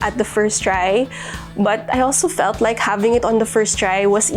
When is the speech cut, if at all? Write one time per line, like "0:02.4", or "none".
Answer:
none